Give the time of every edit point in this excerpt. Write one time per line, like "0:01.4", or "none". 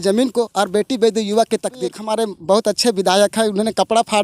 0:02.0